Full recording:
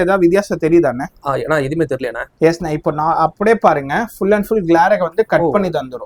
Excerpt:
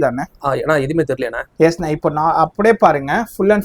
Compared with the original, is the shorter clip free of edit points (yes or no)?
yes